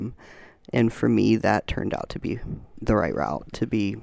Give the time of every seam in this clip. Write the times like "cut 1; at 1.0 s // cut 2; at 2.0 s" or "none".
cut 1; at 2.7 s